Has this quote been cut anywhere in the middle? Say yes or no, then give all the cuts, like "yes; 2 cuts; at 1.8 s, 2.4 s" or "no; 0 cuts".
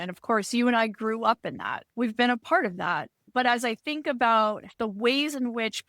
yes; 3 cuts; at 1.8 s, 3.2 s, 4.7 s